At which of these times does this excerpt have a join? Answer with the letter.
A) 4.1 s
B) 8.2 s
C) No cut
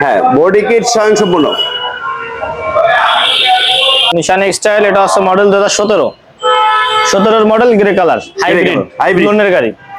A